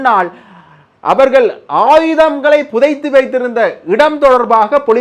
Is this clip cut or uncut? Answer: uncut